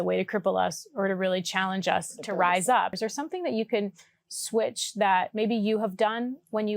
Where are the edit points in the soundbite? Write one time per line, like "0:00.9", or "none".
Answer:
0:03.0